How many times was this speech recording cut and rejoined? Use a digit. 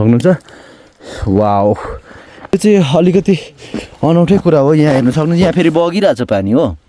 1